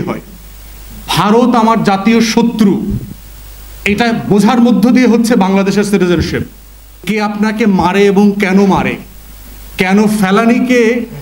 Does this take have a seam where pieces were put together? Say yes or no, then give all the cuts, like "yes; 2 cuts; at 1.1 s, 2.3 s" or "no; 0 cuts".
yes; 1 cut; at 7.0 s